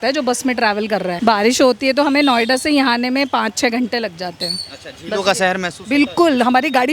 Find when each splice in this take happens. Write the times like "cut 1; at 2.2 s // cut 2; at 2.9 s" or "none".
cut 1; at 1.2 s